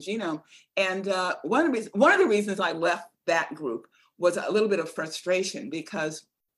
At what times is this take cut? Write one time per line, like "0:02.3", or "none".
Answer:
none